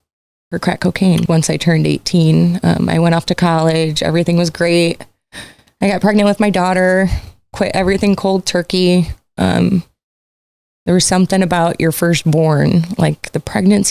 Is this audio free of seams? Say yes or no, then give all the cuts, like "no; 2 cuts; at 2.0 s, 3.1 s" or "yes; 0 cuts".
no; 1 cut; at 1.2 s